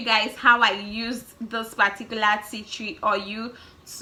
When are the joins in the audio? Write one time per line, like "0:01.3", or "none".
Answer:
none